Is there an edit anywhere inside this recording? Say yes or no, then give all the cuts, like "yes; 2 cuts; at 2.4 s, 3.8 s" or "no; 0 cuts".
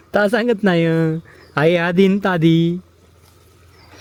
no; 0 cuts